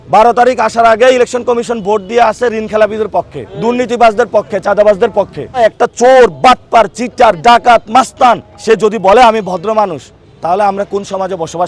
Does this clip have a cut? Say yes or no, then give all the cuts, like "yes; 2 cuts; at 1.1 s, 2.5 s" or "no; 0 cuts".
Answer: yes; 3 cuts; at 3.4 s, 5.6 s, 8.5 s